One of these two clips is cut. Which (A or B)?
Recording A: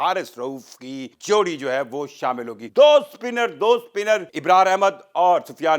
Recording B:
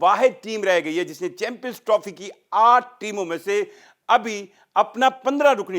A